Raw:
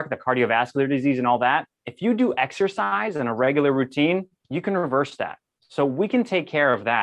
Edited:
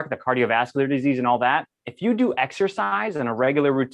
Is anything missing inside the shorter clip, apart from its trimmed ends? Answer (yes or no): no